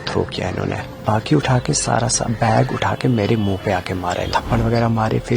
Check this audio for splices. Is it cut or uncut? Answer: cut